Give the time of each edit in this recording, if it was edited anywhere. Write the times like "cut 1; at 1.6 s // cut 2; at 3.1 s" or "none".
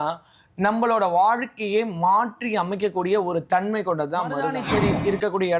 cut 1; at 4.6 s